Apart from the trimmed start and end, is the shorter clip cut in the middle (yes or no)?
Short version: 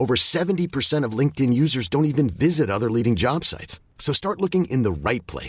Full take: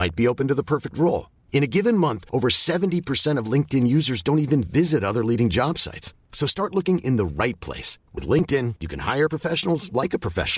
no